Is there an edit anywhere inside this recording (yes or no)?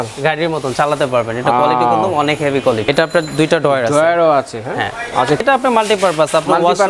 yes